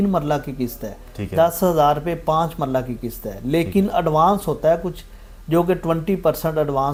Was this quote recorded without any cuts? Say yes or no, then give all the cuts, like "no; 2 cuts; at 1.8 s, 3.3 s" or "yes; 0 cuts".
yes; 0 cuts